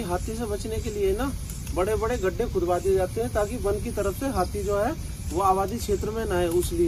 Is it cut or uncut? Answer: uncut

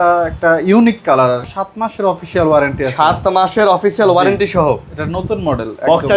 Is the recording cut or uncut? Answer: cut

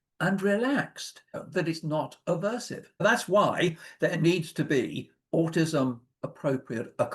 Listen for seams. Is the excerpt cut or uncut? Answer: cut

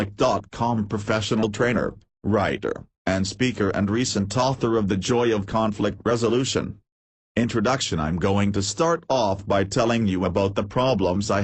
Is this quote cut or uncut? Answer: cut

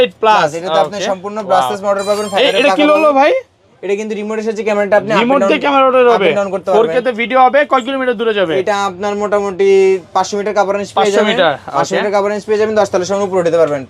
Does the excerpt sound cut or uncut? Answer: uncut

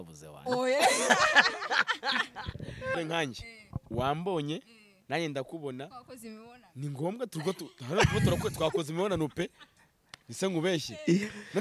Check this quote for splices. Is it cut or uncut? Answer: cut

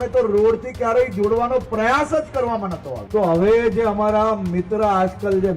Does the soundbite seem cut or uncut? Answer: cut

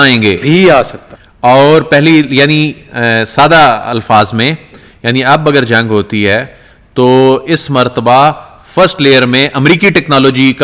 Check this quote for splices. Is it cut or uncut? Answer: uncut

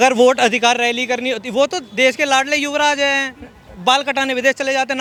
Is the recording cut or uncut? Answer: uncut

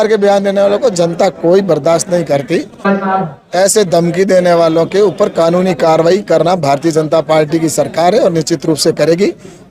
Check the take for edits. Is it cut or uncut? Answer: cut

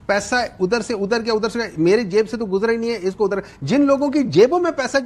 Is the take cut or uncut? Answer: uncut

